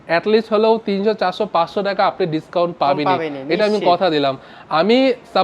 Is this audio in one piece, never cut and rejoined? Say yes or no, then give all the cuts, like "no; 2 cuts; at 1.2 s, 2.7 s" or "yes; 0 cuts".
yes; 0 cuts